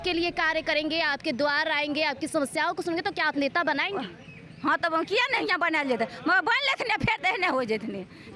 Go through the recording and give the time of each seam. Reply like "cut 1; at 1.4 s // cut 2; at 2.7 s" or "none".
none